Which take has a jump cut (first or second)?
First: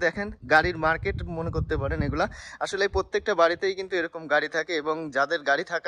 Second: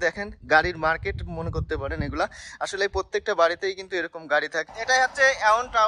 second